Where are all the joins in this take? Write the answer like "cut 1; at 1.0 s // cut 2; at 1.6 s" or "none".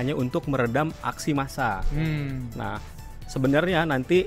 none